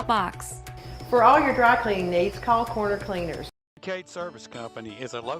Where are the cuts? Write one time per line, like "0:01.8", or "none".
0:03.6